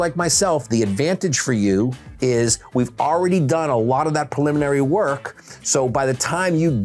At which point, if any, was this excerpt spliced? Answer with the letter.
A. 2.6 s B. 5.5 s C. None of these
C